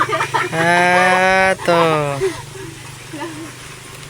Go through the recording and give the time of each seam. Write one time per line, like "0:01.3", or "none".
none

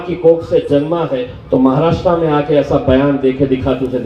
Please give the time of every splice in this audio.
0:01.3

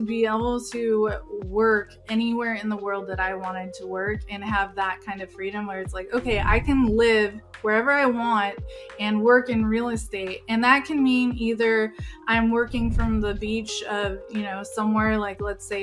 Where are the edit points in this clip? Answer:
none

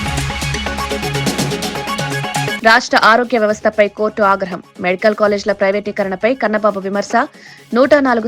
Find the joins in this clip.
0:02.6

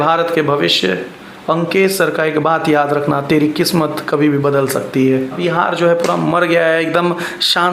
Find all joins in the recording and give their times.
0:05.4

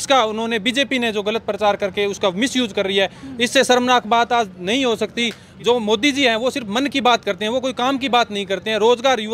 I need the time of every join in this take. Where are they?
0:05.5

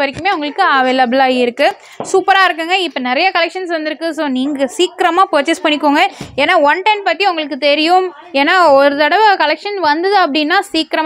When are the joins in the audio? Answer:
none

